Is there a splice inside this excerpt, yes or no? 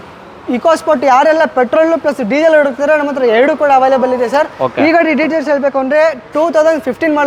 no